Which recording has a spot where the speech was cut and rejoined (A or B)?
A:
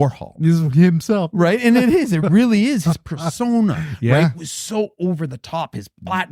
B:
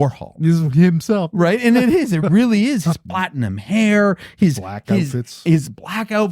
B